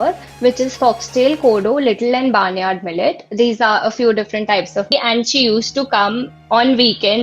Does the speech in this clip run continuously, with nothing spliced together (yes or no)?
no